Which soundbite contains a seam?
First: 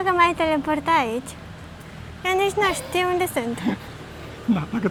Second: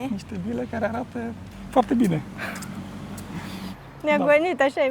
second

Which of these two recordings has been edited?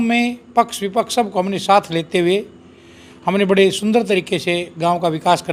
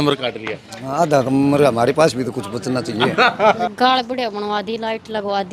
second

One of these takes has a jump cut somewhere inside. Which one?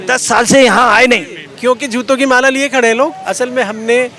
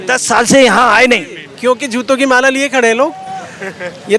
first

